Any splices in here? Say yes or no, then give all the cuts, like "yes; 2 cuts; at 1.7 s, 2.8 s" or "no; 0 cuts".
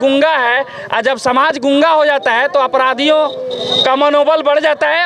no; 0 cuts